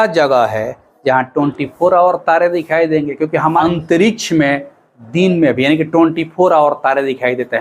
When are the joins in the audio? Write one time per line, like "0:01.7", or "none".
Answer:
0:03.6